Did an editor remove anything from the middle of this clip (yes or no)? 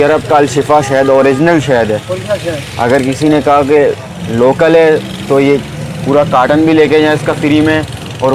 no